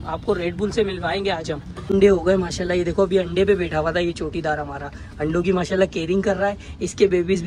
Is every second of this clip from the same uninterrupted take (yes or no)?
no